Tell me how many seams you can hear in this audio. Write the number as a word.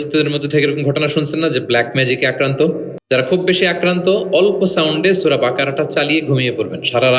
one